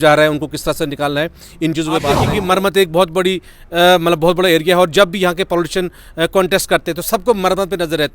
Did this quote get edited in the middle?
yes; 1 cut; at 2.2 s

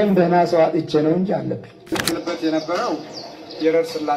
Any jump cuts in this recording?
yes; 1 cut; at 1.9 s

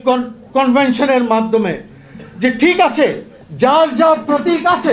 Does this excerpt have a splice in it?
no; 0 cuts

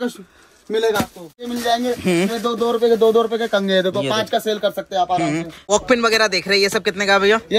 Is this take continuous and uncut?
no; 2 cuts; at 1.4 s, 5.6 s

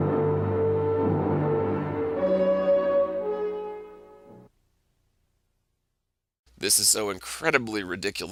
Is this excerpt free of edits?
yes; 0 cuts

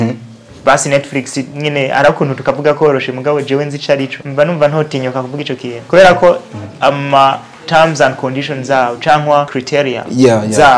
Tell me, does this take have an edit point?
yes; 3 cuts; at 4.1 s, 5.8 s, 9.6 s

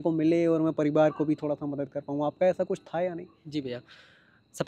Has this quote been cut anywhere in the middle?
no; 0 cuts

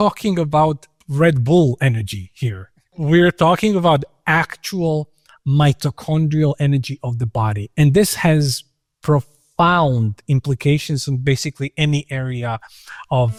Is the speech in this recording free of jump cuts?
yes; 0 cuts

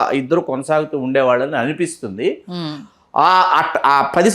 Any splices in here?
no; 0 cuts

